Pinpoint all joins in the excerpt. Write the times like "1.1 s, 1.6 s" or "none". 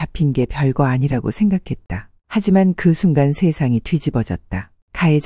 none